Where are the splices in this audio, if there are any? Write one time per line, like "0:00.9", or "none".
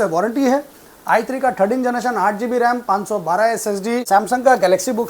0:04.0

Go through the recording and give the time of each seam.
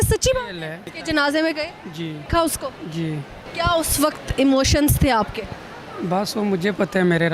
0:00.9
0:02.2
0:03.4

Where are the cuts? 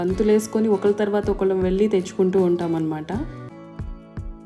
0:03.5

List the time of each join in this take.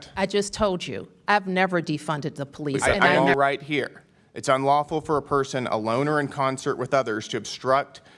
0:03.2

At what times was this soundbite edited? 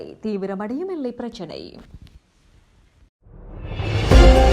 0:02.8

